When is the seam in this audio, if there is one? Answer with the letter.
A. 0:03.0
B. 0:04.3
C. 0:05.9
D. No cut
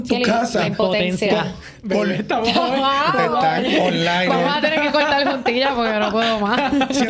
D